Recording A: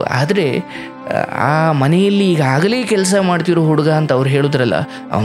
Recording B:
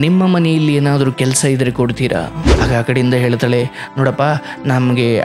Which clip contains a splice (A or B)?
B